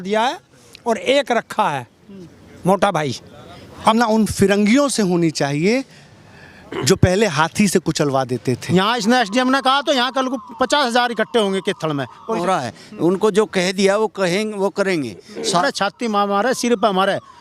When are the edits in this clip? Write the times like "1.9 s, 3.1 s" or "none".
3.9 s, 8.6 s, 12.4 s, 15.6 s